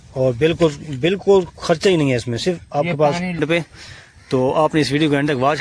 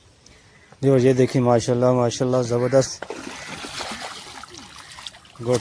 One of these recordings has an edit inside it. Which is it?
first; 1 cut; at 3.4 s

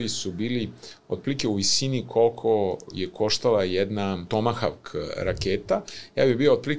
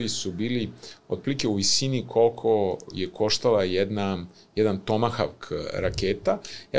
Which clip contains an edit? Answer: first; 1 cut; at 4.3 s

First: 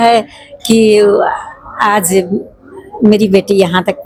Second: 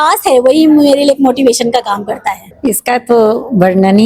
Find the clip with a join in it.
second; 1 cut; at 2.5 s

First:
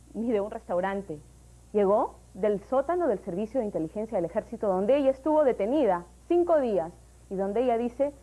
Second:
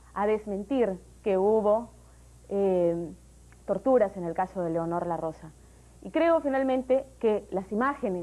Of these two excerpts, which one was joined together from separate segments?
first; 1 cut; at 4.8 s

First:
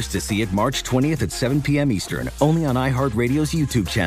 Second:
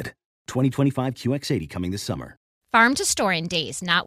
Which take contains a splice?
second; 1 cut; at 2.5 s

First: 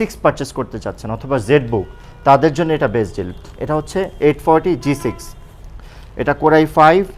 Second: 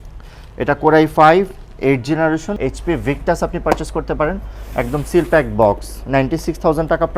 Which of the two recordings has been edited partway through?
second; 1 cut; at 2.5 s

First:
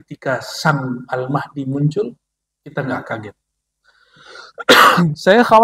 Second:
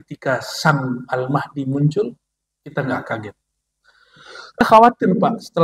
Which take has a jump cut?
second; 1 cut; at 4.6 s

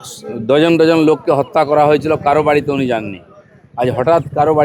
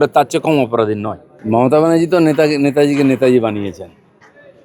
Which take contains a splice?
second; 1 cut; at 1.3 s

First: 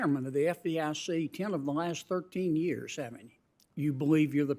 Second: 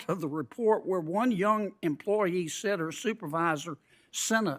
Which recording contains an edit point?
first; 1 cut; at 3.6 s

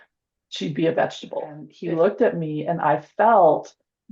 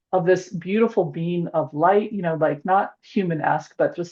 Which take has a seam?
first; 1 cut; at 1.7 s

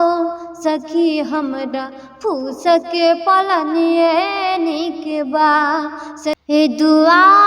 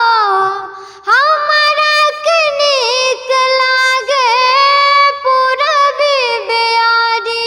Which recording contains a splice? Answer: first; 1 cut; at 6.4 s

